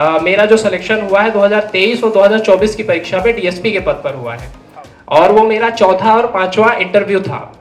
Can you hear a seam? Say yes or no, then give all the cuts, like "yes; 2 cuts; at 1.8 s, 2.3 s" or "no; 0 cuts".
no; 0 cuts